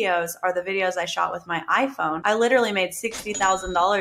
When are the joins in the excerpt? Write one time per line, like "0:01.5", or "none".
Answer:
0:02.2